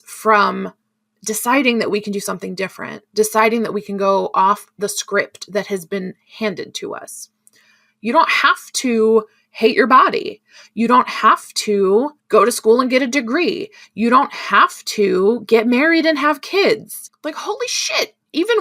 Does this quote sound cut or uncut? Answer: cut